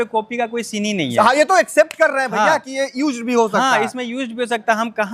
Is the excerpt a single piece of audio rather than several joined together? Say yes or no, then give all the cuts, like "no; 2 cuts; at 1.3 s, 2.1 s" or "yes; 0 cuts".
yes; 0 cuts